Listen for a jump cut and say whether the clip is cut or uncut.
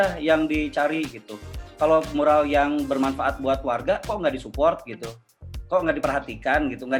uncut